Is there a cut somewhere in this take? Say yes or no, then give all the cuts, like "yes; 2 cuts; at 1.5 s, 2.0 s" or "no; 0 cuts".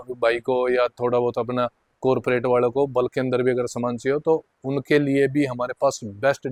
no; 0 cuts